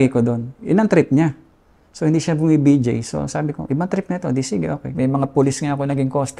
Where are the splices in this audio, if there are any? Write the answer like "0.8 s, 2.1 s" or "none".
4.9 s